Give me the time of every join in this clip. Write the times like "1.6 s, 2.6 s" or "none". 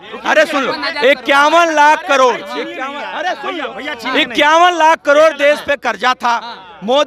none